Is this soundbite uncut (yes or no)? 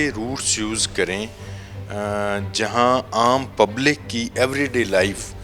yes